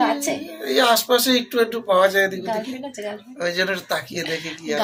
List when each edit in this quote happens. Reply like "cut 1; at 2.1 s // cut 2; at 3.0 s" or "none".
none